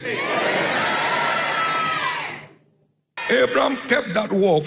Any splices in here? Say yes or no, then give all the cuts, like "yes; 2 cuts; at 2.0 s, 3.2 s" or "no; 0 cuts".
yes; 1 cut; at 3.1 s